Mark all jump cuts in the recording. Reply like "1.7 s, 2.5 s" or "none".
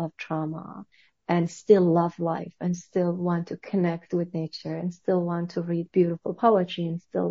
none